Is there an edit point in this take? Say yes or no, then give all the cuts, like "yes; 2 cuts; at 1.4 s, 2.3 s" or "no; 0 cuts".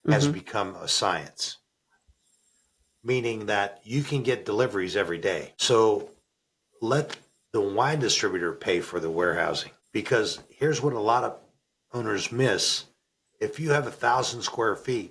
yes; 2 cuts; at 5.5 s, 9.7 s